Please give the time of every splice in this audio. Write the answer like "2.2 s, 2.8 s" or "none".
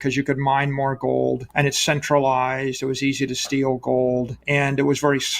1.5 s, 4.4 s